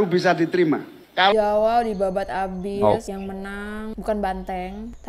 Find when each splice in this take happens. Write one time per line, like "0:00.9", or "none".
0:01.3

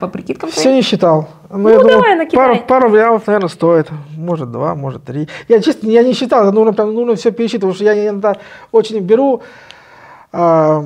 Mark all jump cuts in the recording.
none

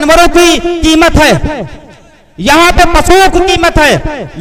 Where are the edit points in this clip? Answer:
none

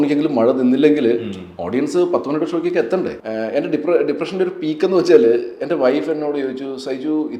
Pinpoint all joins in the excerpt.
0:03.2

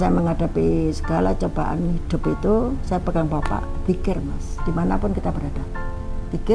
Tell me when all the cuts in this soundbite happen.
none

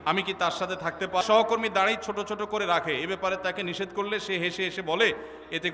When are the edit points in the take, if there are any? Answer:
0:01.2

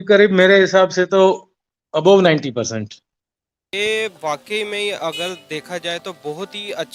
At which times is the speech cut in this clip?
0:03.7

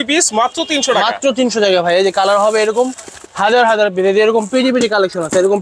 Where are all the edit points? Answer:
none

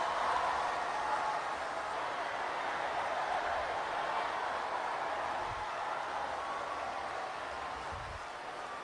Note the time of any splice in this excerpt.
0:01.9

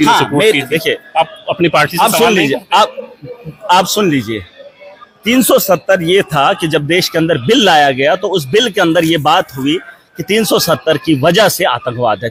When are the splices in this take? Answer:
none

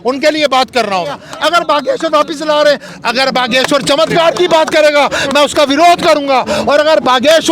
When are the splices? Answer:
0:01.3

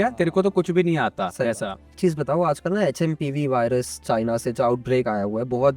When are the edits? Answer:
0:02.0

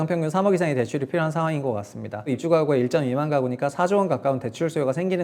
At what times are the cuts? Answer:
0:02.4

